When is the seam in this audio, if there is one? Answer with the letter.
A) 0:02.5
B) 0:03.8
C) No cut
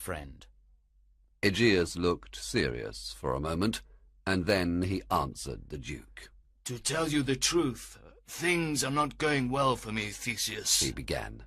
B